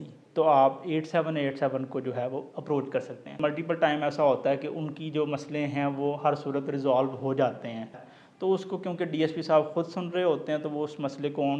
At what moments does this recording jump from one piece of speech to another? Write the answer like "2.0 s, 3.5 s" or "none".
3.3 s, 8.0 s